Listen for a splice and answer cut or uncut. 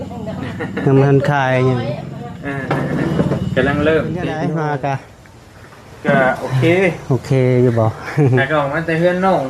cut